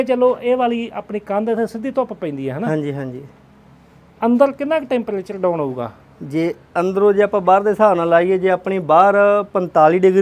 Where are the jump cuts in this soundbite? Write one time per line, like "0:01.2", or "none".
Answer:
none